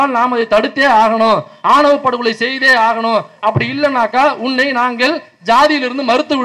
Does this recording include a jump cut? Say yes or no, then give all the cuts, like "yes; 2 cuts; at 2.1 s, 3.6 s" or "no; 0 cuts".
no; 0 cuts